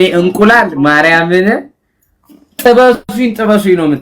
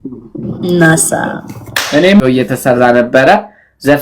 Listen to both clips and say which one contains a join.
second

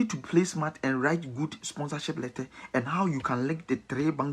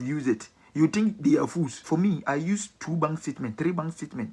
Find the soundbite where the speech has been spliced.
second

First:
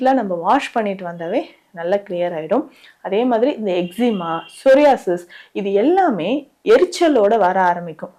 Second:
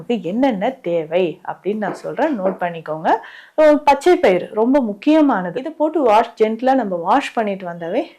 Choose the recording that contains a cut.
second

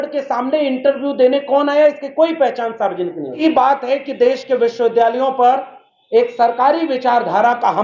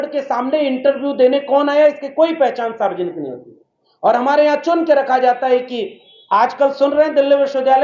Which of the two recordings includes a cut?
first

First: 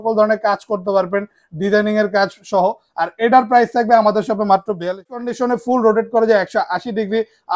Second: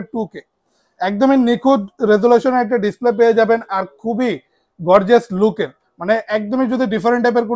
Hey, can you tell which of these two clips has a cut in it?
first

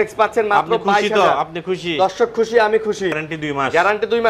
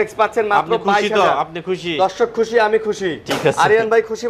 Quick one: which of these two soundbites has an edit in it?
first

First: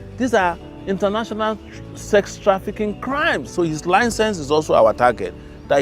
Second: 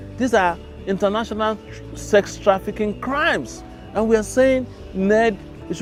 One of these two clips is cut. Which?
first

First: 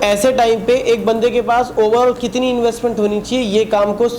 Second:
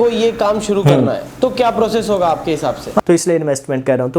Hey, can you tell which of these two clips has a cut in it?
second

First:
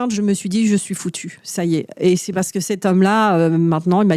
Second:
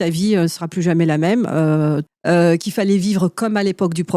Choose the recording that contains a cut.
second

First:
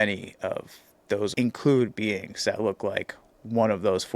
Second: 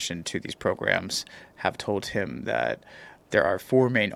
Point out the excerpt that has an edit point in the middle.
first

